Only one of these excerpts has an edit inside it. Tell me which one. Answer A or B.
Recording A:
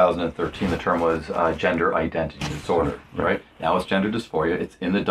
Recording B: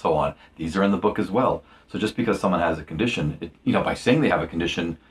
A